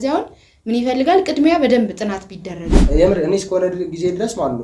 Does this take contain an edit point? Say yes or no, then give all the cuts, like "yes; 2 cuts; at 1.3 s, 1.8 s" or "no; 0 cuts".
yes; 1 cut; at 2.7 s